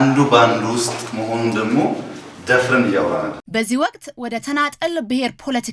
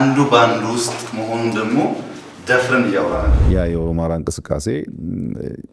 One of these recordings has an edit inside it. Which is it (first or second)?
second